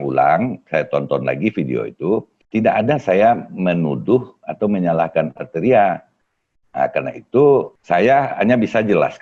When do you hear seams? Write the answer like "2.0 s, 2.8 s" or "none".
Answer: 2.4 s, 7.8 s